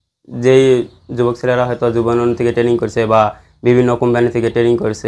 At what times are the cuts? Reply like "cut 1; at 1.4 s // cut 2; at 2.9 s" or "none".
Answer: none